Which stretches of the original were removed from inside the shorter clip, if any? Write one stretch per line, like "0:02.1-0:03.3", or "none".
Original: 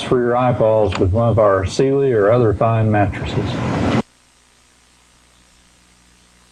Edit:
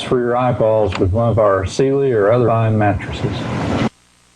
0:02.5-0:02.6